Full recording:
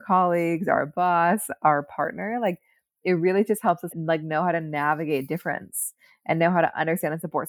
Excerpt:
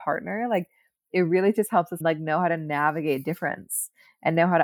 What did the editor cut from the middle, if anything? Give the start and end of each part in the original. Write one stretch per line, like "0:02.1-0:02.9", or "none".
0:03.9-0:04.0